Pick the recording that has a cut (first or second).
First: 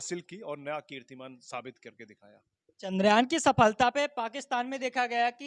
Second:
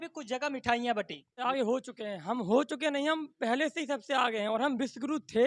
second